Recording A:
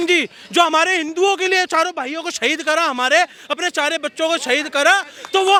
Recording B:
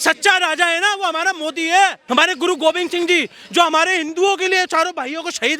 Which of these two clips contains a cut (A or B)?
B